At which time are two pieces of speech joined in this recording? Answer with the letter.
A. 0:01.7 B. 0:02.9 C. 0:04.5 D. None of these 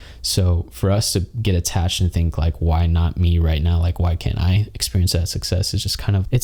D